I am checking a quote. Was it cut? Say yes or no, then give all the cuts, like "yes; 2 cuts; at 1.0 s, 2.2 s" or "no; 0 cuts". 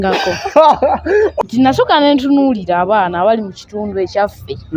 yes; 1 cut; at 1.3 s